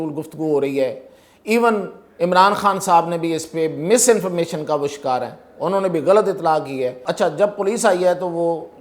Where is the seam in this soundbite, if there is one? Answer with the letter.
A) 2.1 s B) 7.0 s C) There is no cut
B